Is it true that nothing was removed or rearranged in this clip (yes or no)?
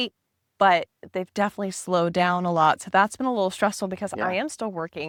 yes